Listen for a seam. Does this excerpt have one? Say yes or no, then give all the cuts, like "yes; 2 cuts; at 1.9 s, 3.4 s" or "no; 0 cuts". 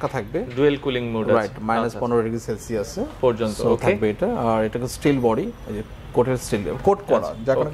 no; 0 cuts